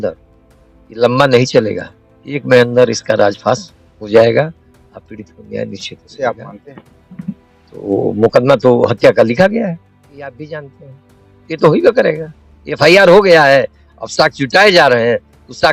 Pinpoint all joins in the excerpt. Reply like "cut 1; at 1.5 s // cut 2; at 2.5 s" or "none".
cut 1; at 6.0 s // cut 2; at 10.2 s